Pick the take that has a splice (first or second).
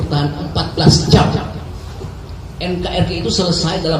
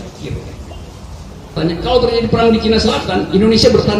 second